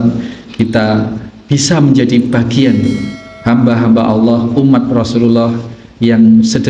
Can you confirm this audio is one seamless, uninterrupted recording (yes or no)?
yes